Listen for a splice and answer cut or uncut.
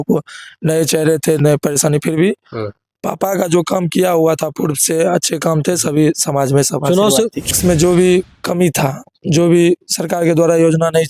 cut